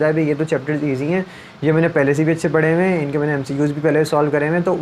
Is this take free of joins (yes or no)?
yes